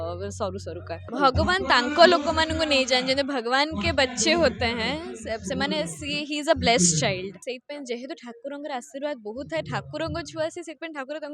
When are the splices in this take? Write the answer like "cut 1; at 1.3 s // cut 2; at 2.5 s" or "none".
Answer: cut 1; at 1.0 s // cut 2; at 7.4 s